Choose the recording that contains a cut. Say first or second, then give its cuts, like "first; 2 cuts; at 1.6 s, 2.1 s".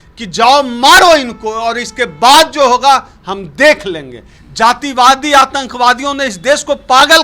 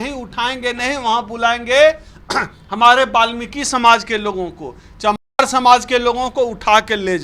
first; 1 cut; at 4.4 s